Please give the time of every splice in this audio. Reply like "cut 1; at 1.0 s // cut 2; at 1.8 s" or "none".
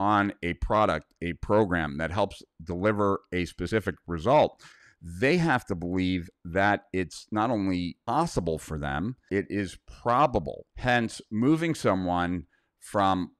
cut 1; at 8.1 s // cut 2; at 9.2 s // cut 3; at 10.6 s